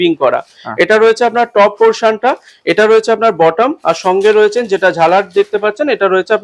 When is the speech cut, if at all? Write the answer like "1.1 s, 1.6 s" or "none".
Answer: none